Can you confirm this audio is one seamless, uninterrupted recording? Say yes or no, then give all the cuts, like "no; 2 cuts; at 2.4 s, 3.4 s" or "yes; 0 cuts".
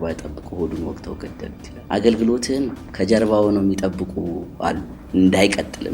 no; 2 cuts; at 1.7 s, 4.9 s